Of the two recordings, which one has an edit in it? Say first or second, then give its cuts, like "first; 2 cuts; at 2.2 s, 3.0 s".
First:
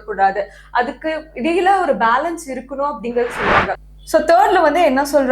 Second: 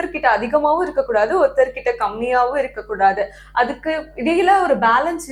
first; 1 cut; at 3.9 s